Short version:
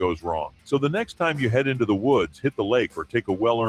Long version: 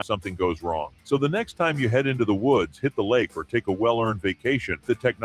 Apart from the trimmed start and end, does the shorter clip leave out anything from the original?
no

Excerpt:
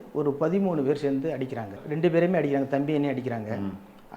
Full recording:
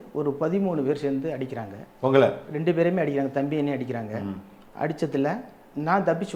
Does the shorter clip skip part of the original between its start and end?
yes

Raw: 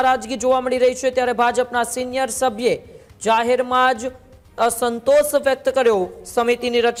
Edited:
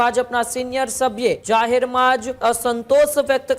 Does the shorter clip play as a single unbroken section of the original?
no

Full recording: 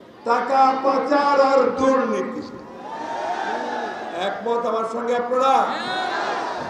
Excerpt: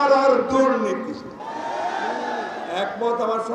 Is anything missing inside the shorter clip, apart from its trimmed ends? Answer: yes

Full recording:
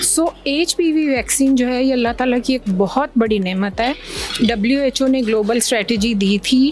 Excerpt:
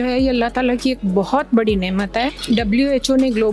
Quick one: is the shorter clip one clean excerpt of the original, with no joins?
no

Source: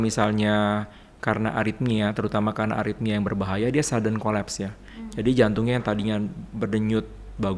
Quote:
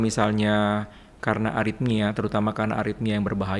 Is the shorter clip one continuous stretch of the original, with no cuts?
yes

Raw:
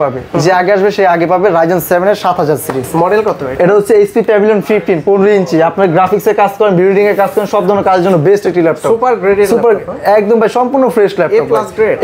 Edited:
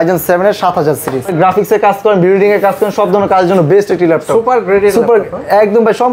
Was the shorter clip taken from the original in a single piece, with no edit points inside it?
no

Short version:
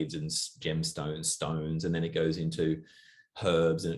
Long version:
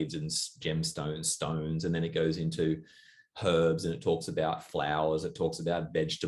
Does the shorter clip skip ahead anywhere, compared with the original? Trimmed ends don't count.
no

